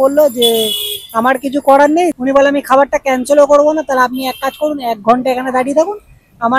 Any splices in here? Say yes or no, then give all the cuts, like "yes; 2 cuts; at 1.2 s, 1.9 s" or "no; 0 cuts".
yes; 1 cut; at 2.1 s